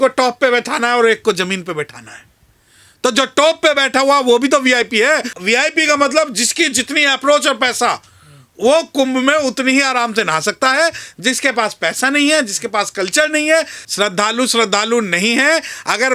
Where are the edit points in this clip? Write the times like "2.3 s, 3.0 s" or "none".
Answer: 5.3 s, 13.8 s